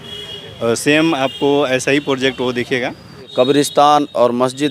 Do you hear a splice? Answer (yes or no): yes